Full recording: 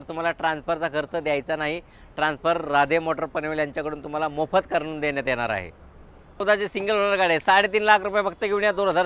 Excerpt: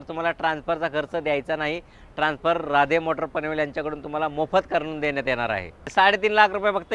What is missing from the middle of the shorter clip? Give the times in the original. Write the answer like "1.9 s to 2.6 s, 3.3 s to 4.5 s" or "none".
5.9 s to 7.4 s